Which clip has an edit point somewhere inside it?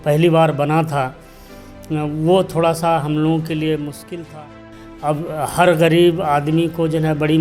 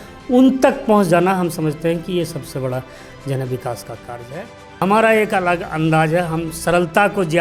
second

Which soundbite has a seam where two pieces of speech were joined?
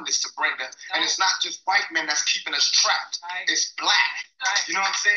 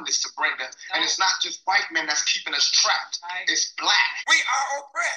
second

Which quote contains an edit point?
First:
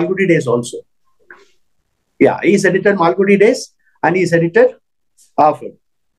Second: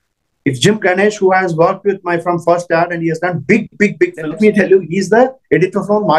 second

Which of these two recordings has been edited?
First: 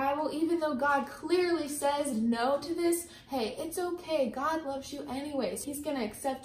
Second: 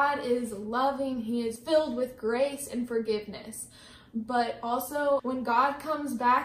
second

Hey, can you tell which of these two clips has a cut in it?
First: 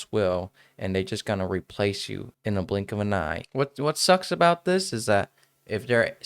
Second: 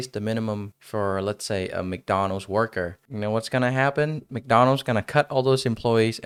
first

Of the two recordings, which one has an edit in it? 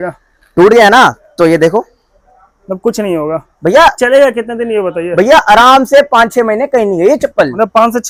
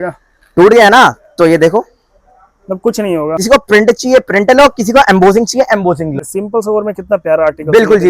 second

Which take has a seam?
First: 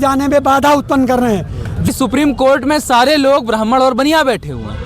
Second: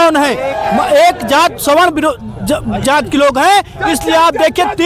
first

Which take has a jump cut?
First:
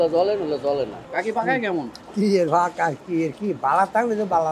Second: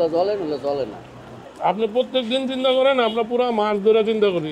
first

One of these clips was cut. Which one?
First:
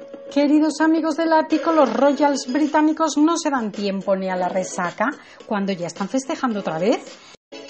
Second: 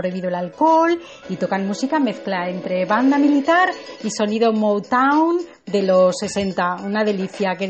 second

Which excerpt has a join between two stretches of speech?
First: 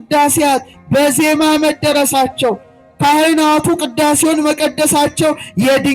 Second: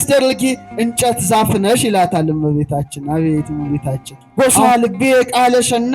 second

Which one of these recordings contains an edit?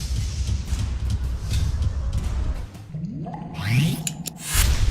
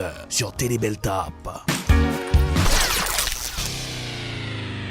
first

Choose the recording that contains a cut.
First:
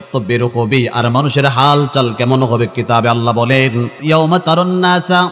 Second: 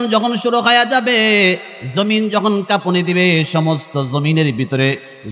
first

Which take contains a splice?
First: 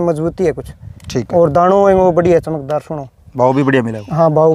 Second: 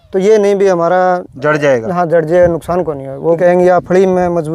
second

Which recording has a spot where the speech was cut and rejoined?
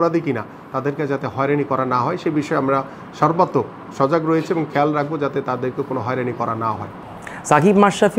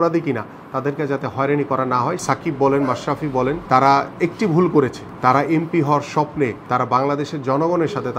second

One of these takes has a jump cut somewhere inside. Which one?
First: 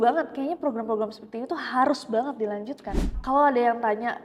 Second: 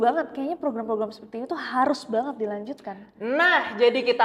first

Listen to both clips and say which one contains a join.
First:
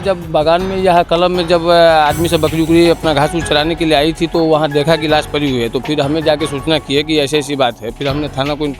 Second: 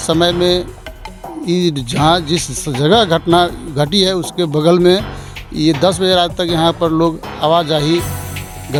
first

